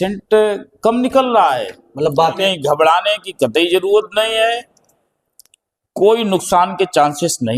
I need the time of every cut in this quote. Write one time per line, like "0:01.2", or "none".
0:02.4